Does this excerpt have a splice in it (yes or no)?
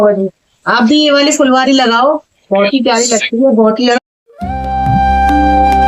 yes